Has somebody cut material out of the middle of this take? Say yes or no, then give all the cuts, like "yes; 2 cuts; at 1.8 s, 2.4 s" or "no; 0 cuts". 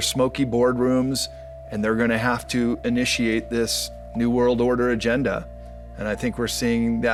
no; 0 cuts